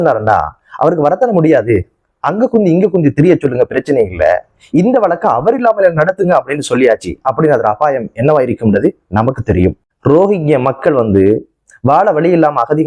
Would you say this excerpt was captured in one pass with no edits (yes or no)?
no